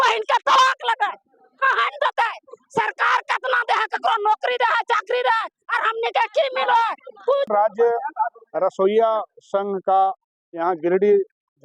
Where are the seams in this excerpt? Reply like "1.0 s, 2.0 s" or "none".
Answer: 7.5 s